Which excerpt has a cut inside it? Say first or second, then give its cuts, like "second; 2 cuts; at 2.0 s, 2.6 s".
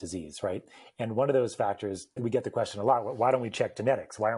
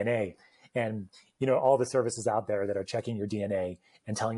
first; 1 cut; at 2.2 s